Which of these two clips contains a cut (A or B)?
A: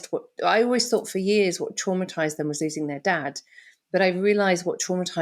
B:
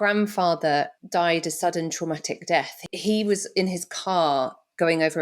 B